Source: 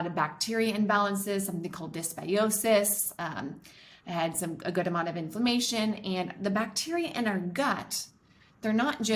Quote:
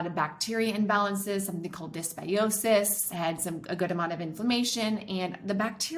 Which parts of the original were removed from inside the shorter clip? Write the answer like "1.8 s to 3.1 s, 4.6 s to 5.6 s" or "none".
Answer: 3.0 s to 4.0 s